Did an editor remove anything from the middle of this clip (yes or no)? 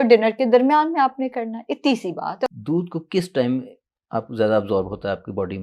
yes